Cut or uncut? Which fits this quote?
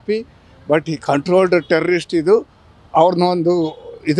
uncut